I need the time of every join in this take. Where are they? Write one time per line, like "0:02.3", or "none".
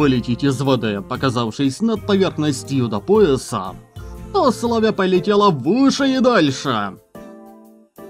none